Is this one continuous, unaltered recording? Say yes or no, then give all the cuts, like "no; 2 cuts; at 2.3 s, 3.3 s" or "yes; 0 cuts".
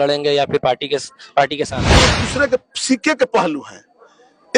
no; 1 cut; at 2.2 s